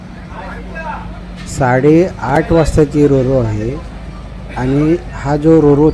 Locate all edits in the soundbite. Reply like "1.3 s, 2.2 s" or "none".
none